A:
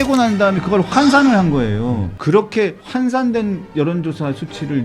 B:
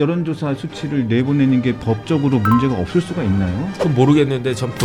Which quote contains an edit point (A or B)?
A